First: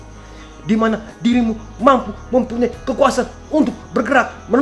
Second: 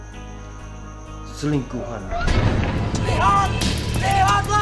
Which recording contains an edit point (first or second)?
second